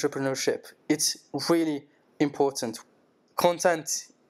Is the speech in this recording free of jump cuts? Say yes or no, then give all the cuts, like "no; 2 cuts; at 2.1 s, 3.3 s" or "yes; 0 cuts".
no; 1 cut; at 2.7 s